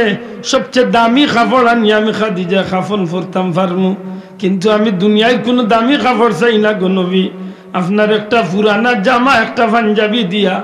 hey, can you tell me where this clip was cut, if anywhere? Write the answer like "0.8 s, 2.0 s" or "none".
none